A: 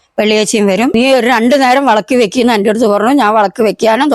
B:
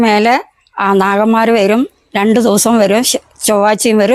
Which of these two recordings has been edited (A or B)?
A